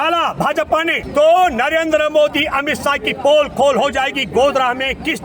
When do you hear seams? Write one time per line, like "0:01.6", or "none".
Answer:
0:01.0